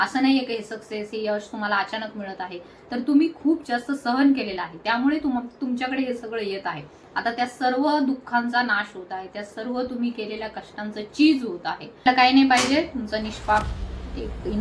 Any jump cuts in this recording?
yes; 1 cut; at 12.0 s

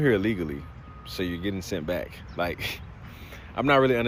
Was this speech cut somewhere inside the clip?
no; 0 cuts

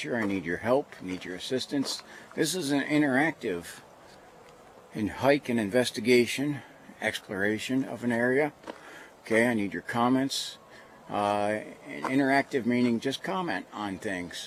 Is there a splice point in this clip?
no; 0 cuts

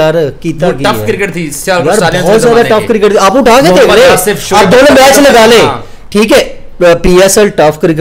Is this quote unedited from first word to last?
yes; 0 cuts

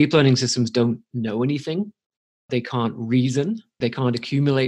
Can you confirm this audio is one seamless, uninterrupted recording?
no; 2 cuts; at 2.5 s, 3.7 s

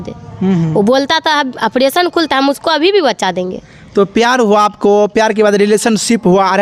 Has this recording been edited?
no; 0 cuts

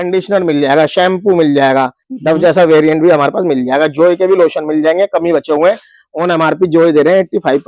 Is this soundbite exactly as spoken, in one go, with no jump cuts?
no; 1 cut; at 2.0 s

